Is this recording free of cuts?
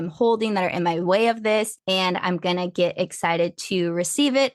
no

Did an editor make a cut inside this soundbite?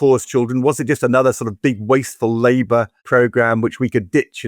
yes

